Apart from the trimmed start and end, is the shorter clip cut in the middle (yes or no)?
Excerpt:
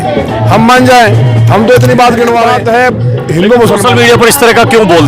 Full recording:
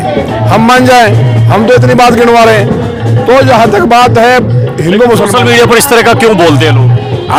yes